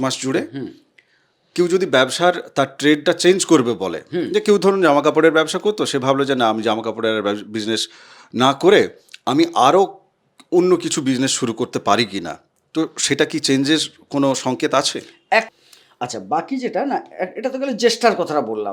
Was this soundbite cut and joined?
yes; 1 cut; at 15.5 s

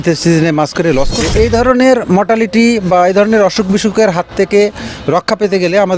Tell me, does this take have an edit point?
yes; 1 cut; at 1.2 s

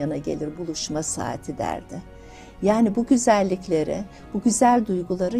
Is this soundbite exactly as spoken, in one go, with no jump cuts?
yes; 0 cuts

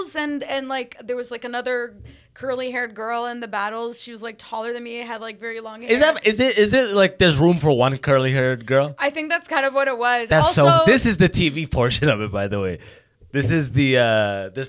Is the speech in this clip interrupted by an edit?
no; 0 cuts

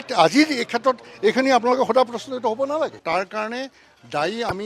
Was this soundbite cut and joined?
yes; 1 cut; at 3.0 s

